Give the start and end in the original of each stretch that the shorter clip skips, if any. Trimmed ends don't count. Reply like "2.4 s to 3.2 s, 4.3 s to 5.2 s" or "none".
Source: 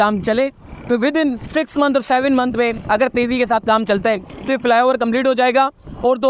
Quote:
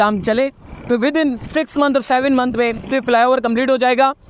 2.8 s to 4.3 s